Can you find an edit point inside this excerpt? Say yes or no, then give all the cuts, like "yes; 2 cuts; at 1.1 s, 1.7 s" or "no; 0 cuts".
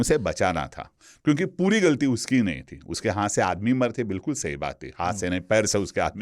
no; 0 cuts